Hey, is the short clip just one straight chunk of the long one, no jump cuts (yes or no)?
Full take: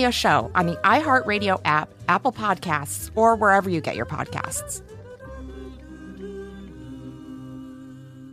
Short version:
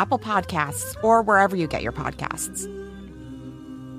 no